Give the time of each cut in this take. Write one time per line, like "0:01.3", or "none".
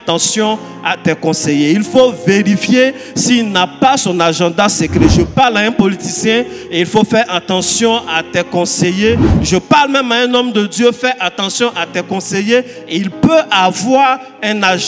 none